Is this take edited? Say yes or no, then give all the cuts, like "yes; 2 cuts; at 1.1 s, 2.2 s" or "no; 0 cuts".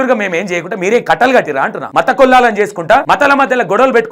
yes; 2 cuts; at 1.8 s, 3.0 s